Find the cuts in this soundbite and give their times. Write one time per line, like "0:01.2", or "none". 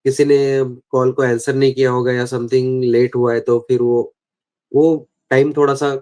none